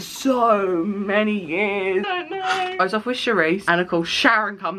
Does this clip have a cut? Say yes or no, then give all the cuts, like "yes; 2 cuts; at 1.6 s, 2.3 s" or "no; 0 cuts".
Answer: no; 0 cuts